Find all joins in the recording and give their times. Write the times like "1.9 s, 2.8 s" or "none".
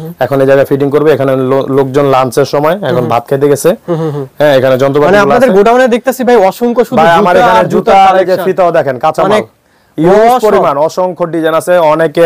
none

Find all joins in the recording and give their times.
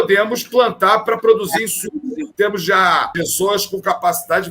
2.2 s, 3.1 s

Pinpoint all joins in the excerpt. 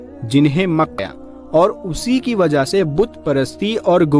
0.9 s

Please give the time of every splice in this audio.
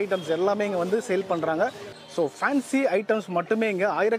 1.9 s

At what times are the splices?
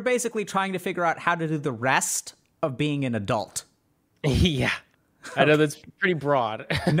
none

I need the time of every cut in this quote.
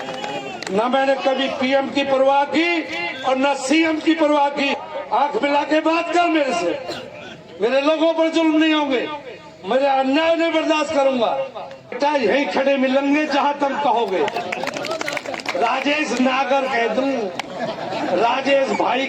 4.8 s, 11.9 s

